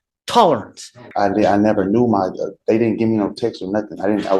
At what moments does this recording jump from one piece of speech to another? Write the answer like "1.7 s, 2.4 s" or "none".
1.0 s